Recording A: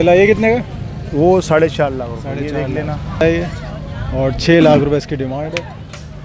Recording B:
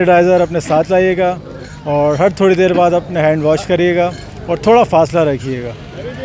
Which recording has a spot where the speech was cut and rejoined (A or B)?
A